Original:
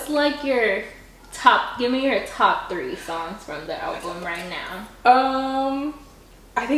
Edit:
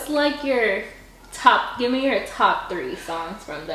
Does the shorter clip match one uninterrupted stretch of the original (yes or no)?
yes